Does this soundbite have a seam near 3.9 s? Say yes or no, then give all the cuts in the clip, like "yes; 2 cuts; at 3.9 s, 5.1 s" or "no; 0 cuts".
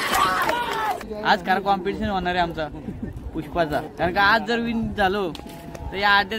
yes; 2 cuts; at 1.1 s, 3.9 s